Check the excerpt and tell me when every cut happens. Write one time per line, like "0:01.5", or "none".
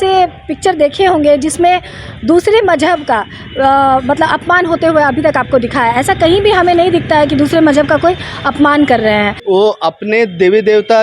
0:09.4